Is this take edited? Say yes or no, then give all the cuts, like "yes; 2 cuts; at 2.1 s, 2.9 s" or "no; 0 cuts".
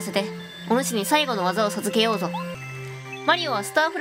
yes; 1 cut; at 2.6 s